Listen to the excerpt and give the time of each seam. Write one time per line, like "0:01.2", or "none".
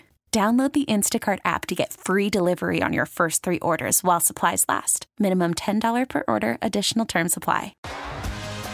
0:07.8